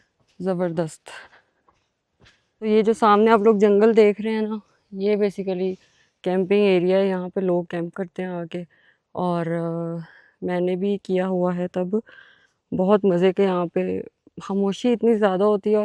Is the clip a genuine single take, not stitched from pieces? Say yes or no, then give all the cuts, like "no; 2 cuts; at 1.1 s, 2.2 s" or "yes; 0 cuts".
no; 1 cut; at 2.7 s